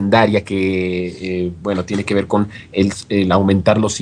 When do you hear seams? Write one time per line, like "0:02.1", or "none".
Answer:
0:02.0